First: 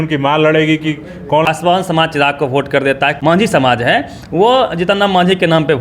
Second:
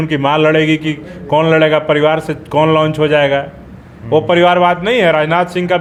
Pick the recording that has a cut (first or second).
first